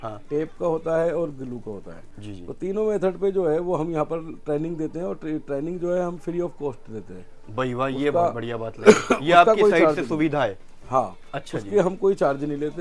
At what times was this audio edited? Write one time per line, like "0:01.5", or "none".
none